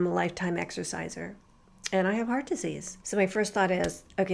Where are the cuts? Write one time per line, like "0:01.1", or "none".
0:02.9